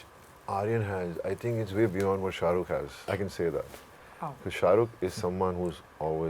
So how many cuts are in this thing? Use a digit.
1